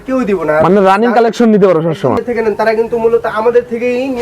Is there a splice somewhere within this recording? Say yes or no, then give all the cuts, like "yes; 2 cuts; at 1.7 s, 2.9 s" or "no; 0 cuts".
yes; 1 cut; at 2.2 s